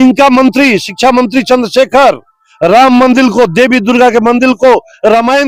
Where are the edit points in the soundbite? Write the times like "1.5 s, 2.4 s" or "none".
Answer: none